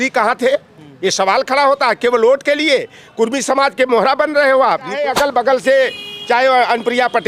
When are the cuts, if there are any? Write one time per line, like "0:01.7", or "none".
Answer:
0:05.0